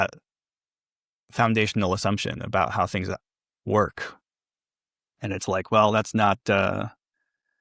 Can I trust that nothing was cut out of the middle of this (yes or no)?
yes